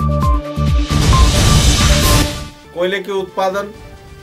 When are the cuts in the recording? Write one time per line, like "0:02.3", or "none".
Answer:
0:02.2